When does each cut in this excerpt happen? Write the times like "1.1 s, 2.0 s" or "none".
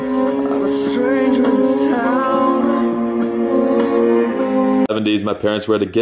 2.5 s